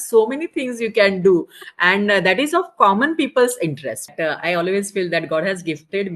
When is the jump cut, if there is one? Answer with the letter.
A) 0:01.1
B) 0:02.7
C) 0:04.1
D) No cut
C